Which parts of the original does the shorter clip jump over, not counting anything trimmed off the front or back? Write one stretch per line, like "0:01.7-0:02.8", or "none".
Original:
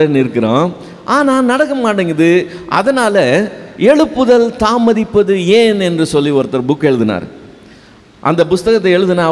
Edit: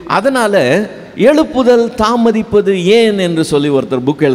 none